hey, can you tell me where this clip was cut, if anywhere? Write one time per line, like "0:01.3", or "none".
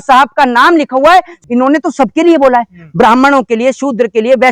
0:01.3